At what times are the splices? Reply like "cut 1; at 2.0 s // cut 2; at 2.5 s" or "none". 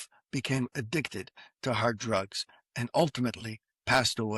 none